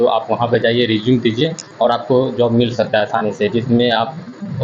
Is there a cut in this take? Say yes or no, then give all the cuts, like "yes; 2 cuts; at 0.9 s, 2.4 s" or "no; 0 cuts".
no; 0 cuts